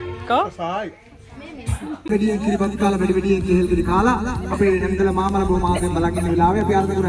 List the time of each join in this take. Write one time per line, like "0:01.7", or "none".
0:02.1